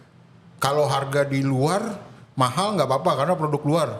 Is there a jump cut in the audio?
no; 0 cuts

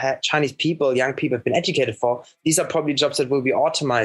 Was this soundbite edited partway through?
no; 0 cuts

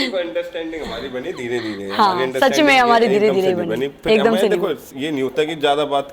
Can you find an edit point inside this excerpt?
no; 0 cuts

